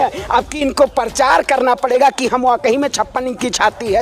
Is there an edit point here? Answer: no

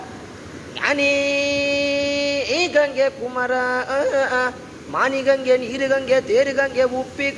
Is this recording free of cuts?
yes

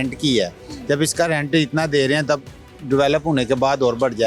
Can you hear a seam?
no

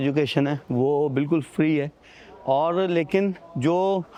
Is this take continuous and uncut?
yes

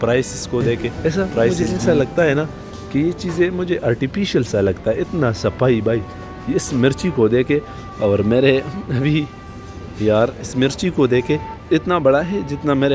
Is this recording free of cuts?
no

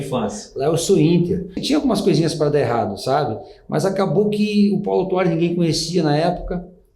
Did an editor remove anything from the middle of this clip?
yes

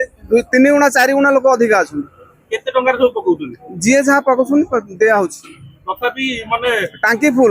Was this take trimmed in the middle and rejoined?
no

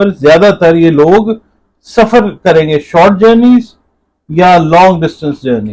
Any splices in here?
no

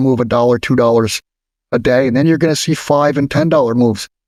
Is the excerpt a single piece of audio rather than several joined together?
yes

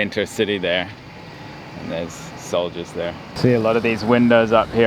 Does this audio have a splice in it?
yes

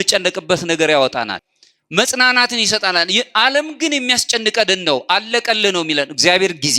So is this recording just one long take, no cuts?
no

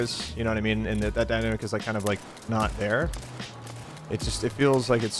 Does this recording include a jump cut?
no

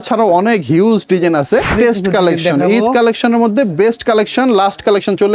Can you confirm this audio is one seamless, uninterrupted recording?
no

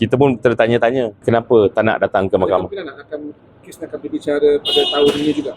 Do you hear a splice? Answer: yes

